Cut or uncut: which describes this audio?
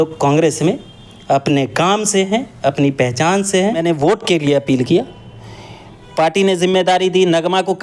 cut